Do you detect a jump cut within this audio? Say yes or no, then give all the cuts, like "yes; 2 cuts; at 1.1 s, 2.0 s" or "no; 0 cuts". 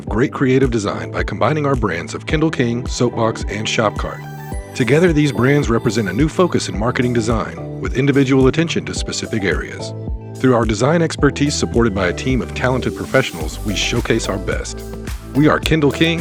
no; 0 cuts